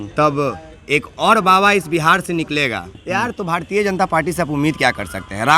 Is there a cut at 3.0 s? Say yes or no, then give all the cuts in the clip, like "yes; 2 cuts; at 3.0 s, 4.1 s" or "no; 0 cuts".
yes; 1 cut; at 3.0 s